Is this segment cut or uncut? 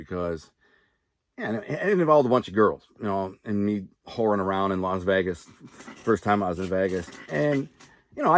uncut